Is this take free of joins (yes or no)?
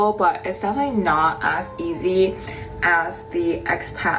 yes